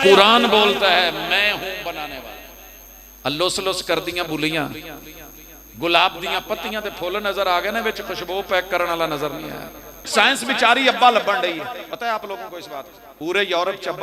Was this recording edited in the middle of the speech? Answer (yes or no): yes